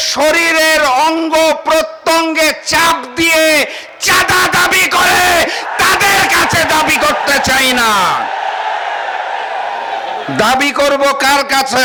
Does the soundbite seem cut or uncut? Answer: uncut